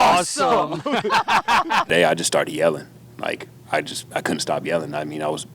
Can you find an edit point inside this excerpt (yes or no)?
yes